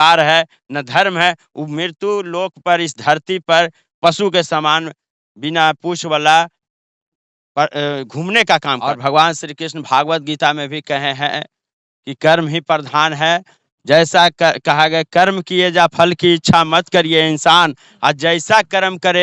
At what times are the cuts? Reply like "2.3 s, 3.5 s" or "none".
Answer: 9.0 s